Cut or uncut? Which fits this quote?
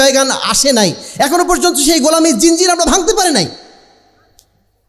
uncut